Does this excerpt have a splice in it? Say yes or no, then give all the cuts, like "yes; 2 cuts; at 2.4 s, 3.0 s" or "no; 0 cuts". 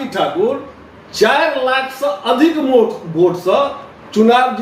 no; 0 cuts